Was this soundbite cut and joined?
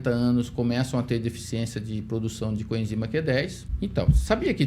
yes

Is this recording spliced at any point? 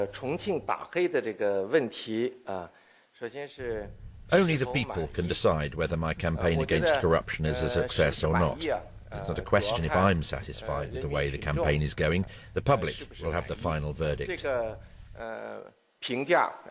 yes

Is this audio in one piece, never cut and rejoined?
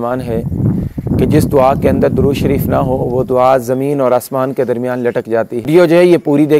no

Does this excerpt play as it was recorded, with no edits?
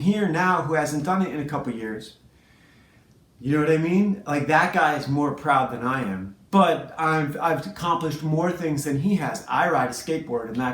yes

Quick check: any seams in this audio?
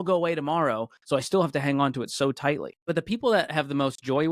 yes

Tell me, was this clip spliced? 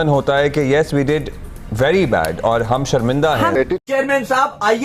yes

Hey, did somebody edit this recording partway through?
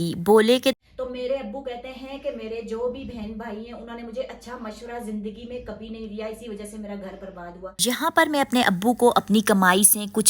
yes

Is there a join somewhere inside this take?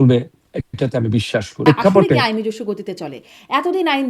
yes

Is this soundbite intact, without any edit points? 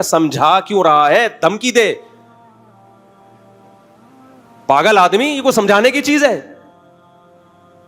yes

